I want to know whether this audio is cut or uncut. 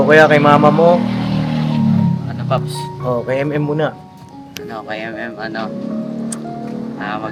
uncut